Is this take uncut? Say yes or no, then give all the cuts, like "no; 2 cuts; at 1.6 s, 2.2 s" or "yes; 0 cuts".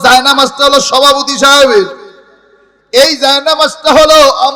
yes; 0 cuts